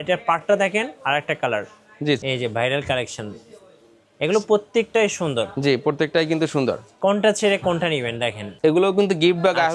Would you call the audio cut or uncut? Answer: cut